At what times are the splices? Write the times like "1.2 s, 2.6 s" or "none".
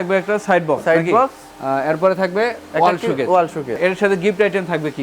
3.8 s